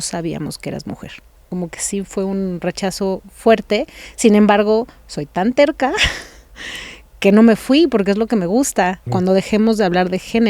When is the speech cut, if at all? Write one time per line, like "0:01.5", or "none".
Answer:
0:01.5
0:09.1